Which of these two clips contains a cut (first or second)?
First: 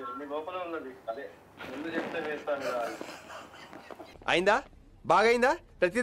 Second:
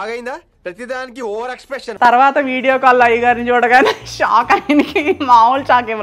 second